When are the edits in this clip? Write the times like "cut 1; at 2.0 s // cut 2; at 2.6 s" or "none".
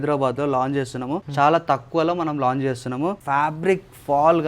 cut 1; at 1.3 s // cut 2; at 3.2 s